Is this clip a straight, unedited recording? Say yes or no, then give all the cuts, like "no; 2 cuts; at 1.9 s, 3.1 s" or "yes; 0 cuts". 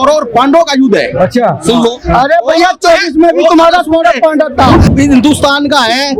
no; 1 cut; at 4.9 s